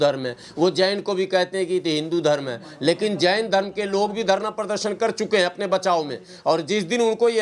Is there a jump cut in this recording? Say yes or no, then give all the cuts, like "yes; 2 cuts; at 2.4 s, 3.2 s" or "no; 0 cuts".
no; 0 cuts